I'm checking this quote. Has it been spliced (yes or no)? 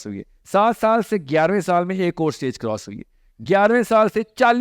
no